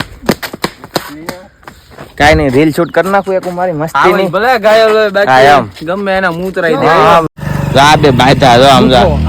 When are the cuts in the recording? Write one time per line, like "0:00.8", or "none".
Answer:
0:07.4